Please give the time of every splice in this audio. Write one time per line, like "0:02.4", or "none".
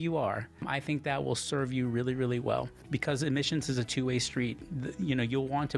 none

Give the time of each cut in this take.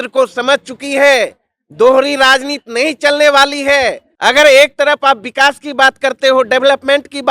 0:04.1

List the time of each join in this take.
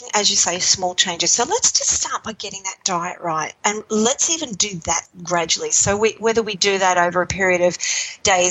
0:03.6
0:05.1

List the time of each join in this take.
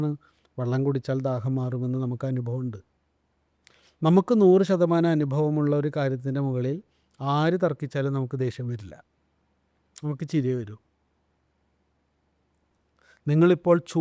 none

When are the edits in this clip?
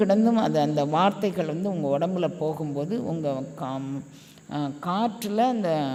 none

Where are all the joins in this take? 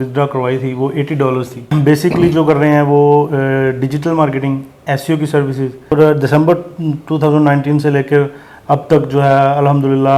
0:01.6
0:05.9

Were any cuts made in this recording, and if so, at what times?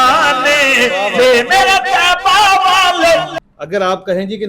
0:03.3

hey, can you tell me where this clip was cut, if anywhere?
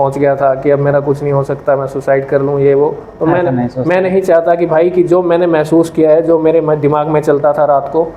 none

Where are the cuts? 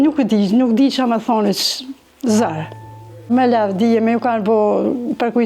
none

